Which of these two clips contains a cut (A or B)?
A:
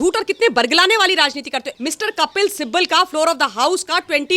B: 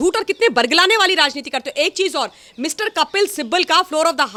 A